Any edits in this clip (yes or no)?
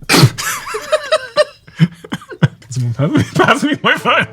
yes